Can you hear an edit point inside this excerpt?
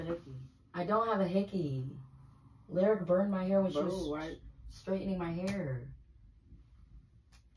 no; 0 cuts

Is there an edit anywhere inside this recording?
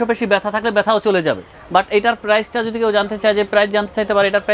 yes; 1 cut; at 1.5 s

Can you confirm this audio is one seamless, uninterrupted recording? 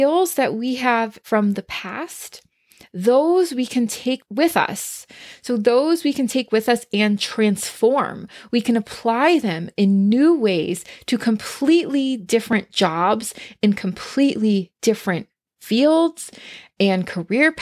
no; 1 cut; at 1.2 s

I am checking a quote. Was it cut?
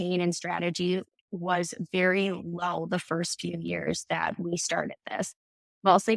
no; 0 cuts

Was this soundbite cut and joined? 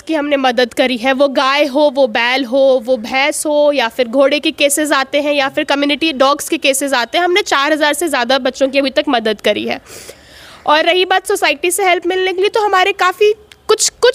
no; 0 cuts

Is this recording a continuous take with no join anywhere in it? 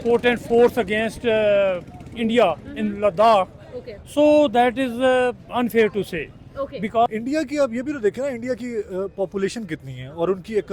no; 1 cut; at 7.1 s

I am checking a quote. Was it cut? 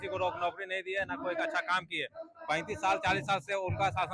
no; 0 cuts

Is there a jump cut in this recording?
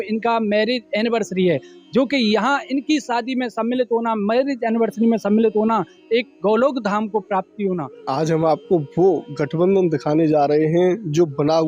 yes; 1 cut; at 8.0 s

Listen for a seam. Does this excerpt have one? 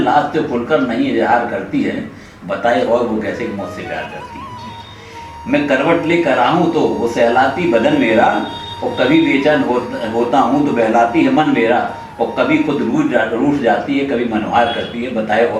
no; 0 cuts

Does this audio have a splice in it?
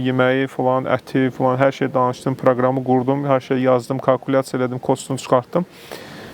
no; 0 cuts

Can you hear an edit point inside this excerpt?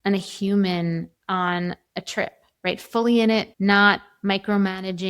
yes; 2 cuts; at 1.1 s, 3.5 s

